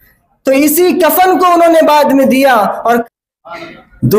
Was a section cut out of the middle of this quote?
yes; 1 cut; at 3.0 s

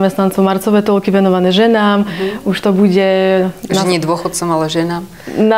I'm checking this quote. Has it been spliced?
no; 0 cuts

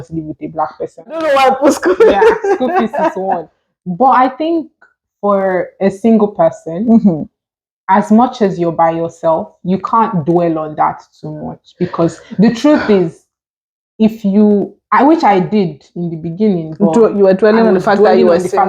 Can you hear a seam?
yes; 1 cut; at 1.2 s

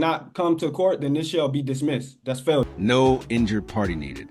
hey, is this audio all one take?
yes; 0 cuts

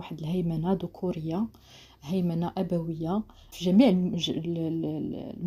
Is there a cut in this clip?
no; 0 cuts

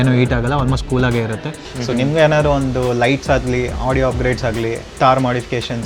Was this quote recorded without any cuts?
no; 1 cut; at 1.6 s

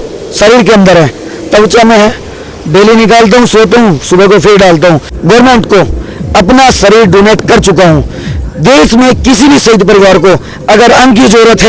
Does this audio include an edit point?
yes; 1 cut; at 5.1 s

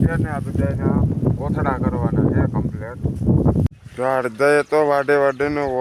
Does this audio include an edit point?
yes; 1 cut; at 3.6 s

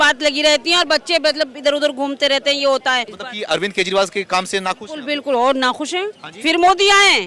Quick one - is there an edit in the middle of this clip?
yes; 2 cuts; at 3.2 s, 6.2 s

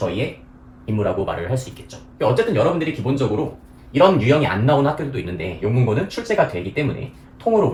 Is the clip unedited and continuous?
yes; 0 cuts

